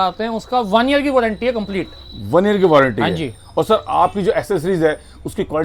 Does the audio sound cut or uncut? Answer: uncut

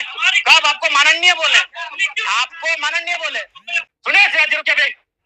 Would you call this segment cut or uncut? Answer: cut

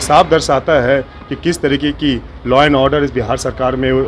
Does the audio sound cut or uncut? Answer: uncut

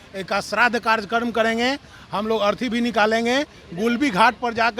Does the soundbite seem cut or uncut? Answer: uncut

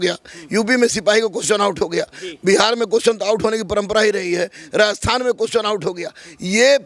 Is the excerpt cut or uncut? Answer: uncut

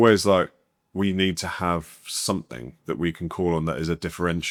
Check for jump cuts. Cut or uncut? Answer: uncut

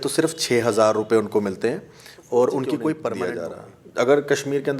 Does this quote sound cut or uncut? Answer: cut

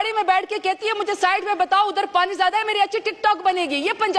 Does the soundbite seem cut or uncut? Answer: uncut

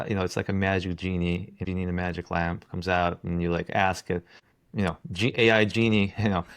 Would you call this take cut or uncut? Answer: cut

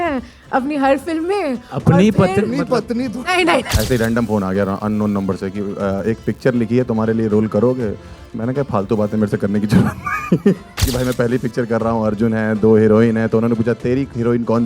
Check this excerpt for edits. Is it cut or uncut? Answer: cut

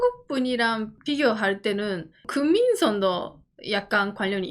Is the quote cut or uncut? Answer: cut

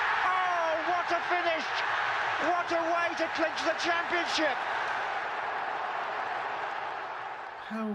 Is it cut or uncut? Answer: cut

